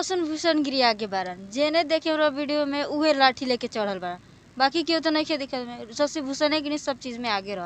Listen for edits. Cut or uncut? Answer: uncut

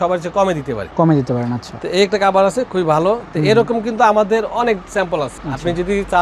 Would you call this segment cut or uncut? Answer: uncut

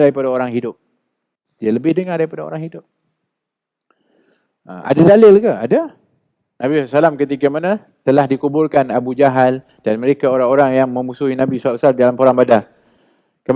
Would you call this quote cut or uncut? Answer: uncut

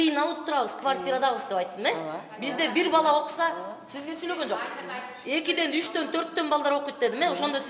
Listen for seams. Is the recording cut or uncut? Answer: uncut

